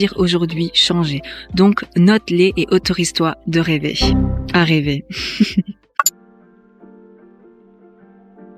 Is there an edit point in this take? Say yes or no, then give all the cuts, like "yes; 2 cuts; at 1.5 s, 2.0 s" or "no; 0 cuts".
no; 0 cuts